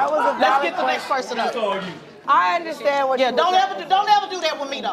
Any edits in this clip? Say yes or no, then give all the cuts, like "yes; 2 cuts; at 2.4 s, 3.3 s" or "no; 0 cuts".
yes; 1 cut; at 1.9 s